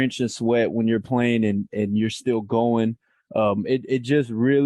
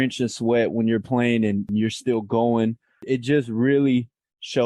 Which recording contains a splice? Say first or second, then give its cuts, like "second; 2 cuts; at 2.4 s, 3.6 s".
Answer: second; 2 cuts; at 1.7 s, 3.0 s